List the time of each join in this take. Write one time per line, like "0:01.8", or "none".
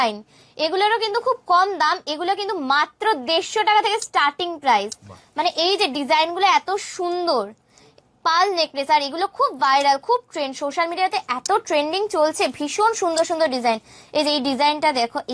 none